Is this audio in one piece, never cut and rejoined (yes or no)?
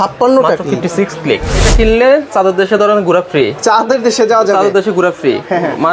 no